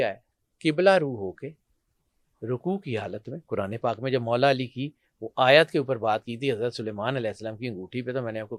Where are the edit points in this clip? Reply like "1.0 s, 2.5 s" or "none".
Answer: none